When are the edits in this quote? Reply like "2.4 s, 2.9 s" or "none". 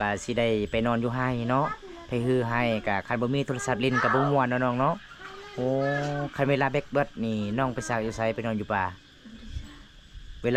none

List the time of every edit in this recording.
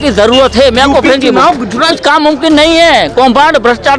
1.9 s

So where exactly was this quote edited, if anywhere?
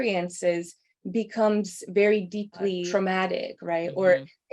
2.8 s

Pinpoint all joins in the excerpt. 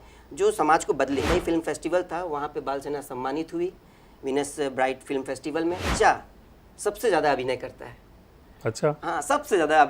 1.3 s, 5.8 s

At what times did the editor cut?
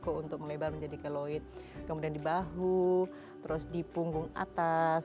none

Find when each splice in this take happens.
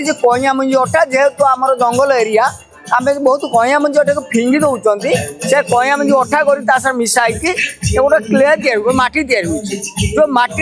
none

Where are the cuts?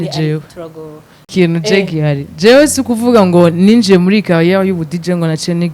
1.3 s

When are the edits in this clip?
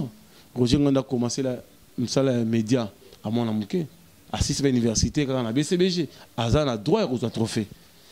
none

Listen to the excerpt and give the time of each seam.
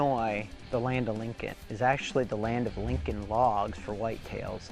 1.2 s

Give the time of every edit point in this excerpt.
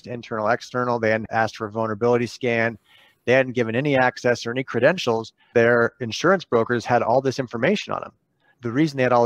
1.2 s, 5.5 s

